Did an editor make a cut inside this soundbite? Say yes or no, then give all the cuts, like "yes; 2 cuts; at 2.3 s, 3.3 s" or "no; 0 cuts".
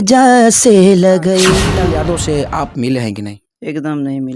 yes; 1 cut; at 1.7 s